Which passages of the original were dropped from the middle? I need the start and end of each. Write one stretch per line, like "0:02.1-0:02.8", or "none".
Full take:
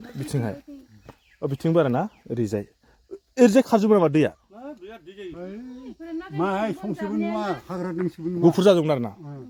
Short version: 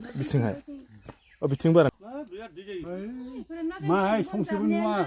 0:01.9-0:04.4